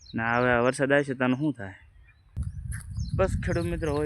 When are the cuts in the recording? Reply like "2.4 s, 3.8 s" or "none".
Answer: 2.5 s